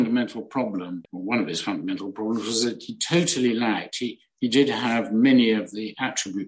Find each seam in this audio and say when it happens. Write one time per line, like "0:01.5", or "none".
0:01.0